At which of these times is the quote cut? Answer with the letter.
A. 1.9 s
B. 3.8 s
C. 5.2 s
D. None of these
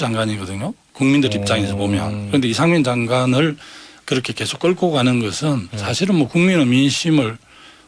D